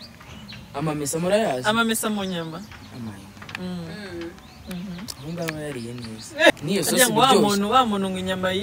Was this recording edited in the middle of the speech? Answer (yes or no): yes